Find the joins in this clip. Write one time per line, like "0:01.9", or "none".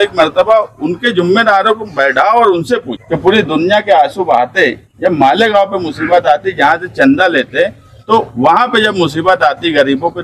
0:02.9